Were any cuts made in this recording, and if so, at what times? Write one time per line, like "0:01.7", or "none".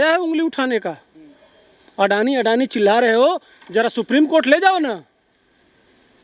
none